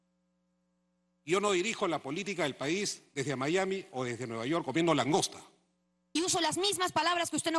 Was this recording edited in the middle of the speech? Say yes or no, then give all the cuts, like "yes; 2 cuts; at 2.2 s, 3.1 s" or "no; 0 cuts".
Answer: yes; 1 cut; at 6.1 s